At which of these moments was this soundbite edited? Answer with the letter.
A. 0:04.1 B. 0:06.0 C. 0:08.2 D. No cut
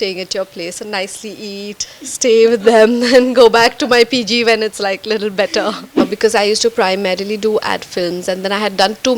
B